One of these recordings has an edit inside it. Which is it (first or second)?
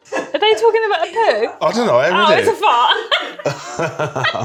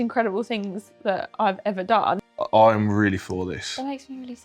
second